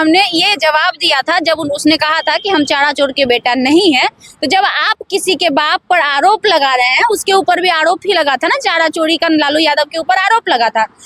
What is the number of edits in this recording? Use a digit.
0